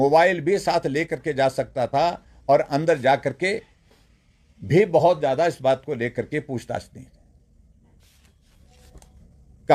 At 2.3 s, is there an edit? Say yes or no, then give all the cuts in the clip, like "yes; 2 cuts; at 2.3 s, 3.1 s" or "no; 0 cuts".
no; 1 cut; at 8.0 s